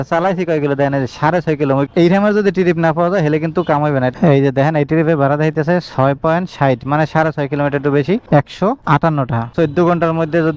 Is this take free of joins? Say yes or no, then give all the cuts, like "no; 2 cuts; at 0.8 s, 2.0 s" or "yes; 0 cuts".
no; 3 cuts; at 1.9 s, 4.1 s, 9.5 s